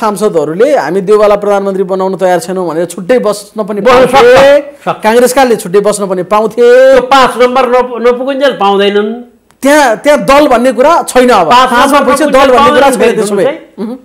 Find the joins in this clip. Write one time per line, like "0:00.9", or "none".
none